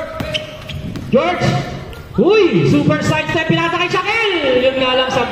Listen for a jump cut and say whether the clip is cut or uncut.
uncut